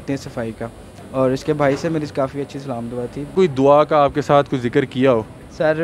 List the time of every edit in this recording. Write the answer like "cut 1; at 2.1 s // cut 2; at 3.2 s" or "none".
cut 1; at 3.3 s